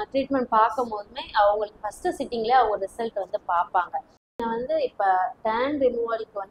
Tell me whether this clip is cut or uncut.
cut